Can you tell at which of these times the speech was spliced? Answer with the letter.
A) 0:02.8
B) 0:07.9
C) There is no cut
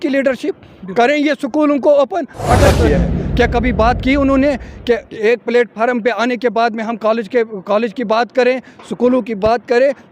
A